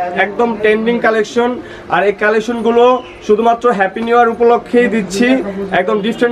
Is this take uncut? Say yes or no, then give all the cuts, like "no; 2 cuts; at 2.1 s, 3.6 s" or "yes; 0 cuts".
yes; 0 cuts